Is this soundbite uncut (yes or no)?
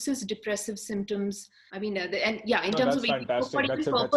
yes